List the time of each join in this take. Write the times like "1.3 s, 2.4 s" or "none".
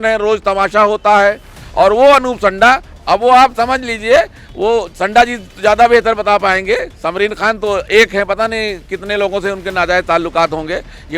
none